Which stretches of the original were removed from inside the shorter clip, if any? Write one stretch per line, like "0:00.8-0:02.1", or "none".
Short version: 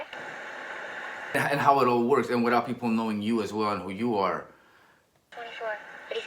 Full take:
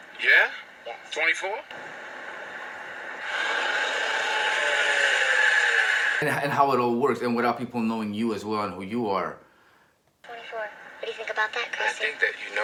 0:02.9-0:06.3